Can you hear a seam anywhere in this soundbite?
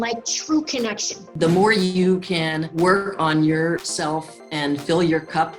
yes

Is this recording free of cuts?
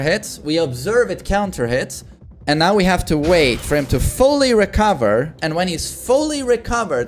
yes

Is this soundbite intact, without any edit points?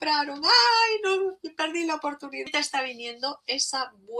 no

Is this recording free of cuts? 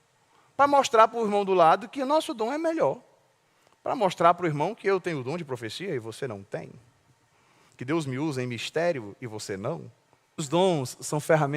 no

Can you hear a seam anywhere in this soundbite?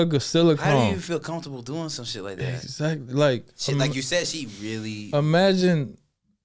no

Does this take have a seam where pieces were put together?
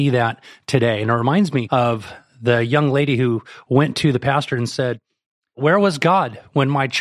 yes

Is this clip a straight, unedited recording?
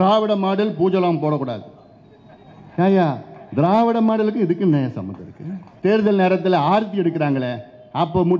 no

